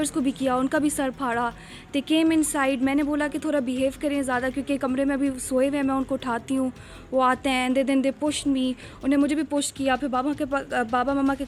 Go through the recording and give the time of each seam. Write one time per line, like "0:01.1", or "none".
none